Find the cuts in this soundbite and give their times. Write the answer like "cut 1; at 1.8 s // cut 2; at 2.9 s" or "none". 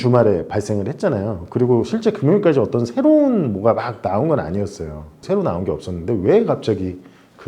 cut 1; at 5.2 s